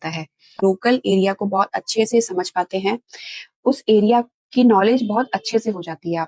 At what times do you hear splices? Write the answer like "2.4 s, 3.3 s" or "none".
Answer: none

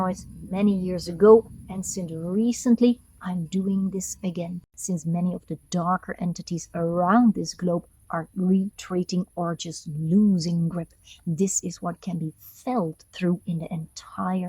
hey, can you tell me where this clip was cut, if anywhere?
4.7 s

